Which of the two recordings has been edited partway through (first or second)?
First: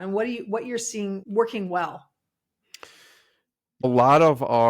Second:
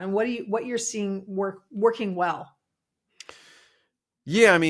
first